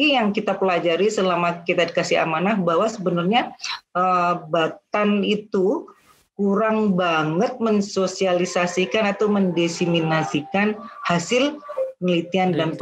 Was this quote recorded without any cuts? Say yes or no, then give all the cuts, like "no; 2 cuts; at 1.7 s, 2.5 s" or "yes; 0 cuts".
yes; 0 cuts